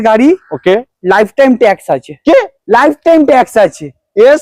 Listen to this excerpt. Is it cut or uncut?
uncut